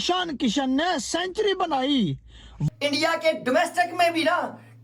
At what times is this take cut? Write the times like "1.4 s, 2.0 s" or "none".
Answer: 2.5 s